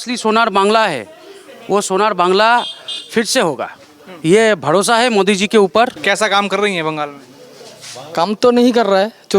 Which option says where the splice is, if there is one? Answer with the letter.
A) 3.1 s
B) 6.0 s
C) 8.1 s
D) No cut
B